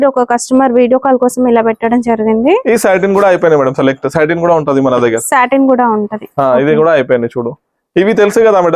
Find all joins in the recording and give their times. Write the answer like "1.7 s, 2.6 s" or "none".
none